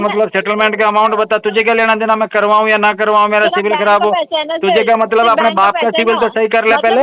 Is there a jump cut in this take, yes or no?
no